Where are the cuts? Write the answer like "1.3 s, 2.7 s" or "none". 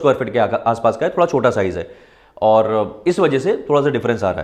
none